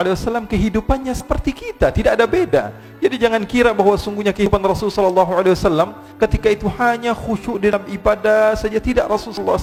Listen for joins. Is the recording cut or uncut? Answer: uncut